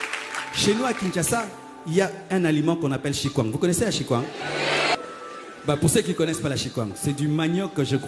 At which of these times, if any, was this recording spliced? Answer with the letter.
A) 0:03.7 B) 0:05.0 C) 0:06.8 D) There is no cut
B